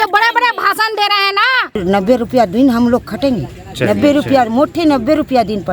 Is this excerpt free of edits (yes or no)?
no